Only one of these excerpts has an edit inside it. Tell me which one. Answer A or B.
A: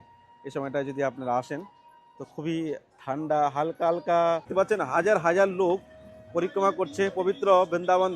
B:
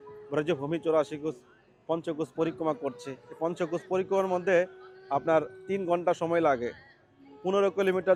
A